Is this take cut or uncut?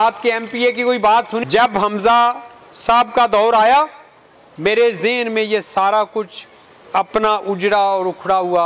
cut